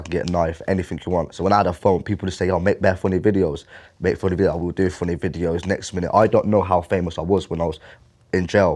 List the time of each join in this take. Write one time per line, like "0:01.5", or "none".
0:01.3